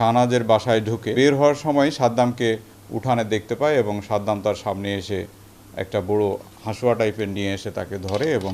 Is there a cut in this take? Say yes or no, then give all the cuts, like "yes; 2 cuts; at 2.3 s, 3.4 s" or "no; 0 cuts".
yes; 1 cut; at 1.1 s